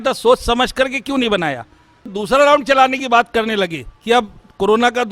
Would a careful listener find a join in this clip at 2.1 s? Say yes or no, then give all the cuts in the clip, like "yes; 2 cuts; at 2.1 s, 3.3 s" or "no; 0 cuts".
yes; 1 cut; at 2.1 s